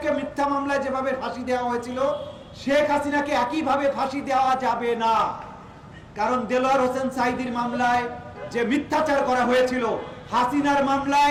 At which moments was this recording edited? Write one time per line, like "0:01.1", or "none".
none